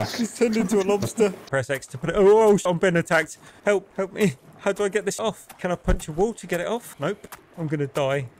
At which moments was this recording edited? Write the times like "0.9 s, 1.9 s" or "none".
1.4 s, 2.6 s, 5.2 s, 7.4 s

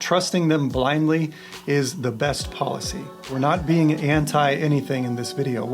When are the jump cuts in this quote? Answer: 3.2 s

